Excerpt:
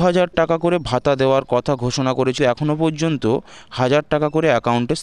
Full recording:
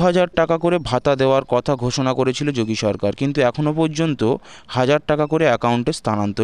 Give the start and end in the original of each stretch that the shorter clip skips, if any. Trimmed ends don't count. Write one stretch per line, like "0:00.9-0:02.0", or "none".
0:02.4-0:03.3